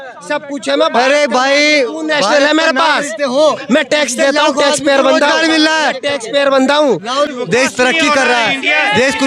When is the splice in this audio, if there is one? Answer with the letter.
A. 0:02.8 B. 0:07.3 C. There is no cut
B